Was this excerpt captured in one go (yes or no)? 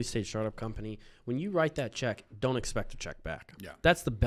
yes